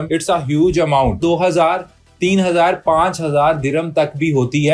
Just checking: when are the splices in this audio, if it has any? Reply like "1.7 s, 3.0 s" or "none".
1.2 s